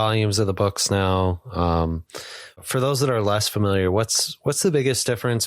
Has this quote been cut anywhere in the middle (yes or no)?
yes